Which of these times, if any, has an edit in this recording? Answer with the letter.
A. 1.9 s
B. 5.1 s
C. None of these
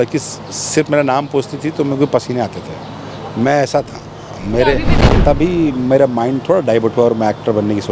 B